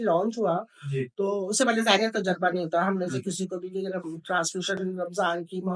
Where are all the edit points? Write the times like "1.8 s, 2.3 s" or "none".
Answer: none

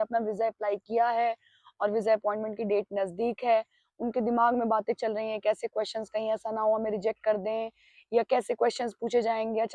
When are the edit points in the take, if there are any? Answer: none

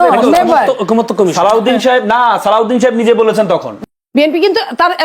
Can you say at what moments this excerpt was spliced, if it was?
3.7 s

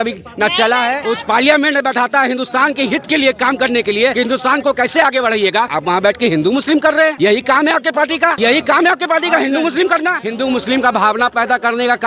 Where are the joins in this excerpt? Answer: 1.0 s, 4.1 s, 5.7 s, 7.1 s, 8.4 s, 10.2 s

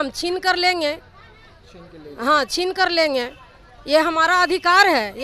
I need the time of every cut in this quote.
none

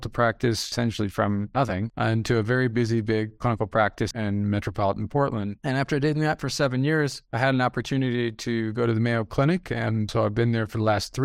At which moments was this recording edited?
1.6 s, 4.1 s, 5.5 s

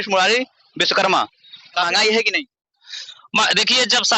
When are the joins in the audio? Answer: 1.9 s

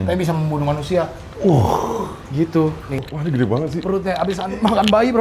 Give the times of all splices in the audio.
3.0 s

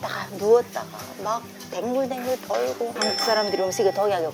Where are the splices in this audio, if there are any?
2.9 s

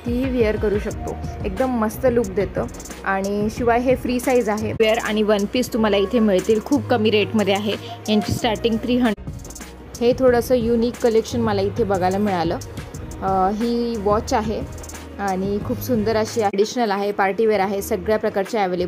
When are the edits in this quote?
4.8 s, 9.1 s, 16.5 s

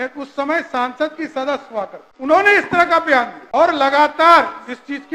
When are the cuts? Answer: 2.0 s, 3.4 s

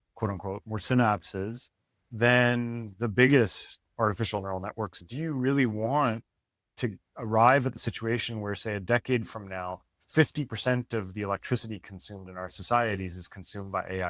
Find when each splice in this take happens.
5.0 s

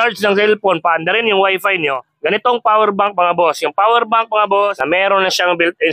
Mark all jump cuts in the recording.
2.0 s, 4.8 s

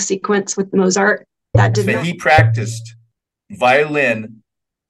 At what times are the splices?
1.8 s

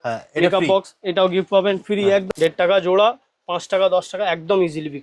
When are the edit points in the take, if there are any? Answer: 2.3 s

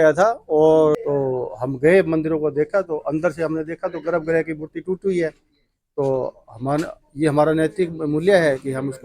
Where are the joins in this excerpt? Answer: 1.0 s

